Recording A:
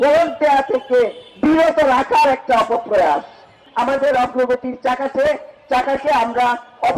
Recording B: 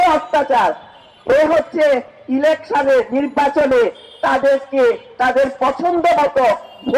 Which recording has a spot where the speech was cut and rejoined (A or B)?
A